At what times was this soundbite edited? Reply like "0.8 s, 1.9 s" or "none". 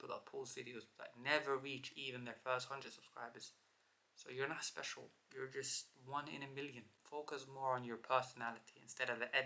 6.9 s